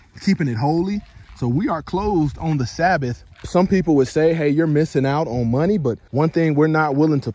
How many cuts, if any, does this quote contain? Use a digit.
2